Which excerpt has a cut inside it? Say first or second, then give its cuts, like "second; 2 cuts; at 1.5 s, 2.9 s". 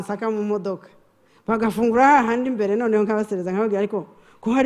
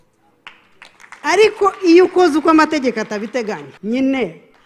second; 1 cut; at 3.7 s